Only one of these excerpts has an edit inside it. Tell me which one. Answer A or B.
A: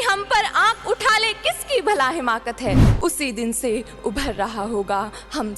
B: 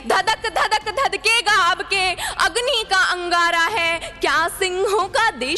A